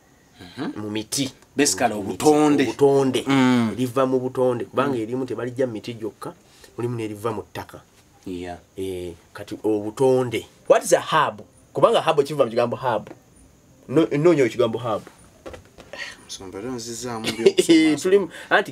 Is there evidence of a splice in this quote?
yes; 1 cut; at 10.6 s

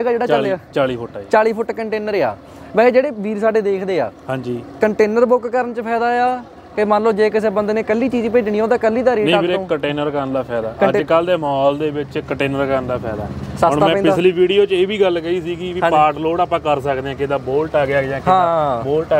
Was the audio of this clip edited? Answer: no; 0 cuts

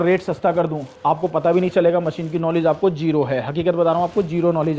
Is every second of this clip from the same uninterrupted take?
yes; 0 cuts

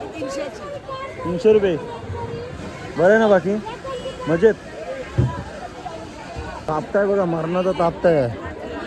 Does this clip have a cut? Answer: yes; 1 cut; at 6.6 s

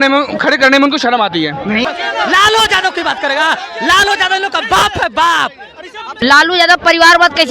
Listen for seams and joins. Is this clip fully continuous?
no; 2 cuts; at 1.8 s, 6.2 s

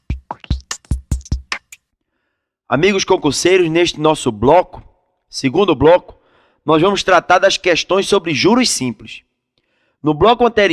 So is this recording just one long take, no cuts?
no; 1 cut; at 1.7 s

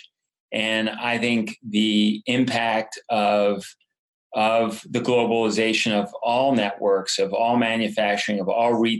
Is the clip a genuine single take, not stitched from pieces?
yes; 0 cuts

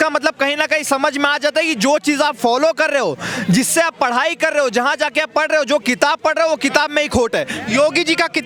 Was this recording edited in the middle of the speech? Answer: no; 0 cuts

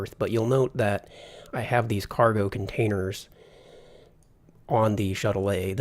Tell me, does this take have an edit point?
yes; 1 cut; at 0.9 s

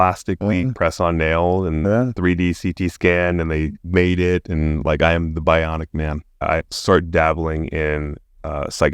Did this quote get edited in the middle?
yes; 1 cut; at 6.4 s

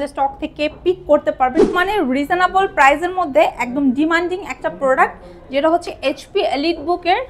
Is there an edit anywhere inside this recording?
yes; 1 cut; at 1.7 s

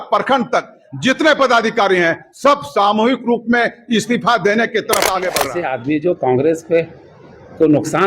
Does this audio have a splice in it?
yes; 1 cut; at 5.5 s

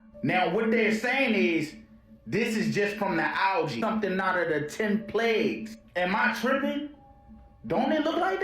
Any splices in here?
yes; 1 cut; at 3.8 s

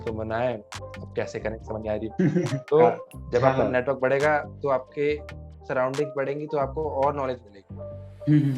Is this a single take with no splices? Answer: no; 1 cut; at 3.1 s

